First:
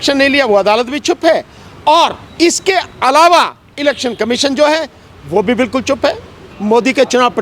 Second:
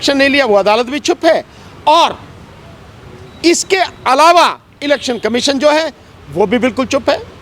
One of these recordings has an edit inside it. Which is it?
first; 2 cuts; at 2.2 s, 6.5 s

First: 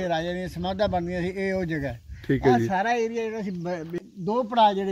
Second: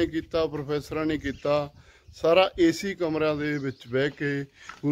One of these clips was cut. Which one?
first; 1 cut; at 3.9 s

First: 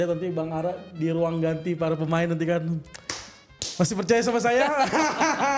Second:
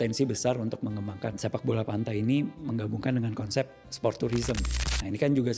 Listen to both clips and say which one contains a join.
second; 2 cuts; at 1.4 s, 4.7 s

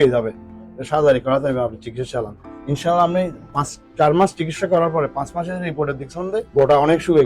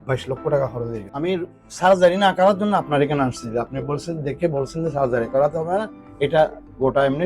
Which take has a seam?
second; 1 cut; at 1.0 s

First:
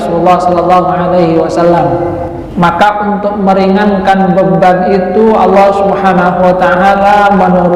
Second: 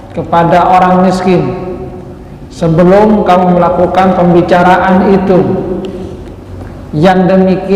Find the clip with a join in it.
first; 1 cut; at 2.4 s

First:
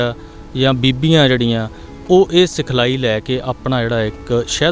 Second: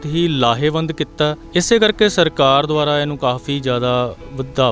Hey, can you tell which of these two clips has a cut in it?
second; 1 cut; at 1.4 s

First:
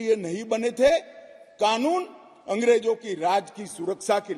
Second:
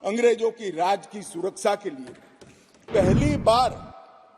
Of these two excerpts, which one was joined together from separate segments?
second; 1 cut; at 2.9 s

